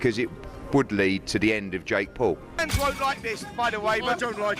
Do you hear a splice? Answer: yes; 1 cut; at 2.6 s

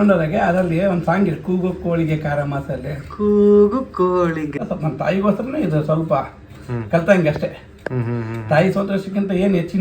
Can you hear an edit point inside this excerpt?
yes; 1 cut; at 4.6 s

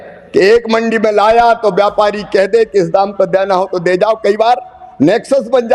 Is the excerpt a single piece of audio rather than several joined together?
yes; 0 cuts

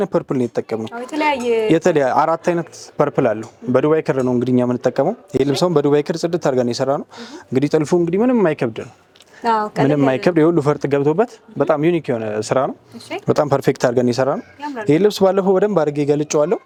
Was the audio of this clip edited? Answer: no; 0 cuts

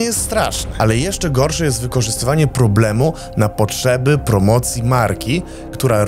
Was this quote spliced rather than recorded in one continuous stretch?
no; 0 cuts

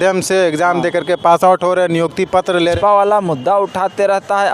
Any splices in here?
yes; 1 cut; at 2.8 s

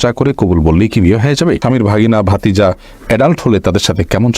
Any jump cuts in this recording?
yes; 1 cut; at 1.6 s

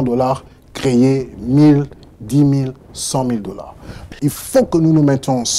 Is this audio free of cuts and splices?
no; 1 cut; at 4.1 s

